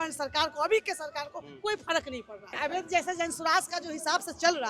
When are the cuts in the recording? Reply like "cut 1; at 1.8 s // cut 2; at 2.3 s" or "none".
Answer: cut 1; at 2.5 s